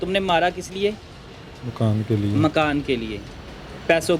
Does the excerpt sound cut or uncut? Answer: uncut